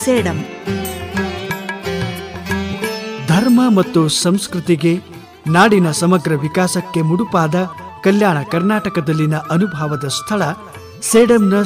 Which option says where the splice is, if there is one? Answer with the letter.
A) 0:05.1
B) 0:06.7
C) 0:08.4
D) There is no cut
D